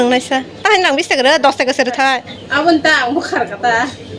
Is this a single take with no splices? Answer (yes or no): yes